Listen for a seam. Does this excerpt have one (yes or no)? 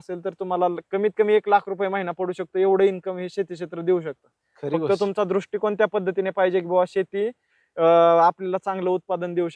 no